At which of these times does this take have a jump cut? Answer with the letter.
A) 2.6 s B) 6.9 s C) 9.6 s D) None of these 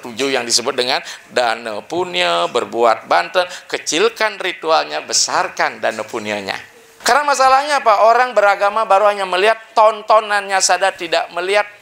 B